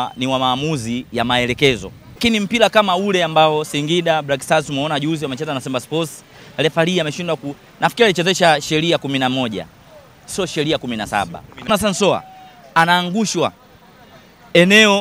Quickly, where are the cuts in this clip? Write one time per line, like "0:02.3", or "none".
0:02.2
0:11.7